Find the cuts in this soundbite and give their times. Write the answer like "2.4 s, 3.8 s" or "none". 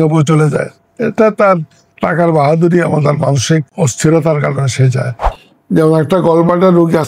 3.7 s, 5.2 s

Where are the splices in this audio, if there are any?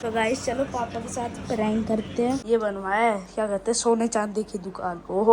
2.4 s

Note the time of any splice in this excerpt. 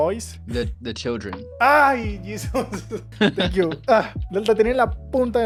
none

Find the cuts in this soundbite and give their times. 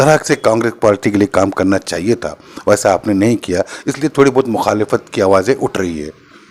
none

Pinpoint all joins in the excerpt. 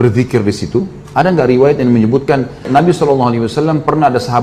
2.7 s

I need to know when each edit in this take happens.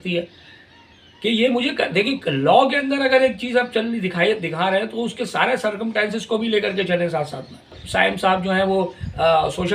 7.8 s

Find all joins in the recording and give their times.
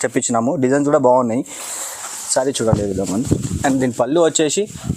none

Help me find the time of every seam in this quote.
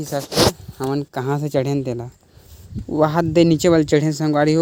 none

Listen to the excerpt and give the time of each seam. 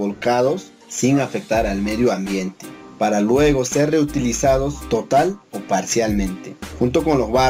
none

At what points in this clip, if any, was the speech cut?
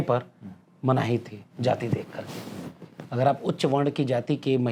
none

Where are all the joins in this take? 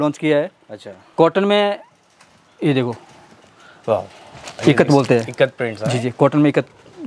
none

